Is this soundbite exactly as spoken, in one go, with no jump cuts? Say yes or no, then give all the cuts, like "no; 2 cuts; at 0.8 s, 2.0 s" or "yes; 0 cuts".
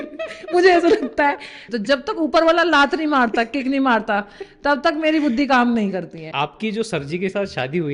no; 2 cuts; at 1.6 s, 6.2 s